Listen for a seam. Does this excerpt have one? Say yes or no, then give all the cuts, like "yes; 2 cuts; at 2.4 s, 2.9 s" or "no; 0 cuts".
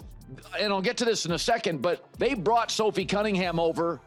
no; 0 cuts